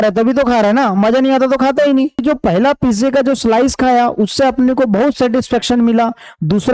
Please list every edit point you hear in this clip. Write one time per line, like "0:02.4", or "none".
0:02.2